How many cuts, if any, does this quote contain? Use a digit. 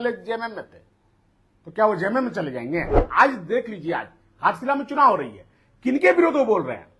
1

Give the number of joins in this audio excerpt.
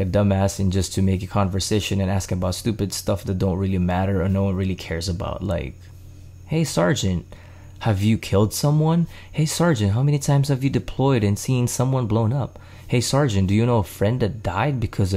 0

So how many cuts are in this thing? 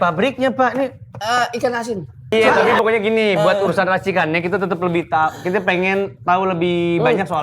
1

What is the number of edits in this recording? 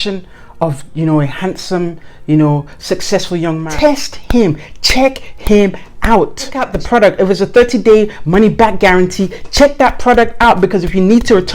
2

